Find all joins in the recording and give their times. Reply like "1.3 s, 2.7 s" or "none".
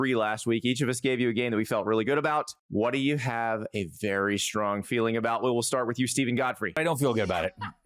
2.6 s, 6.8 s